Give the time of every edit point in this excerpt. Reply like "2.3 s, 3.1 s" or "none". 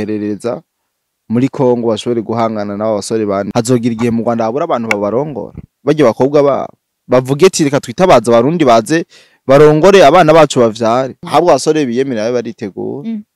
3.5 s, 11.2 s